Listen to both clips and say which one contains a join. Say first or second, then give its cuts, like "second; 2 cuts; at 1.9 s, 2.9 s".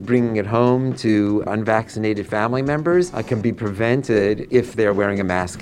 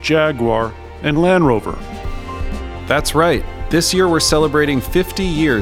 first; 3 cuts; at 1.5 s, 3.2 s, 4.4 s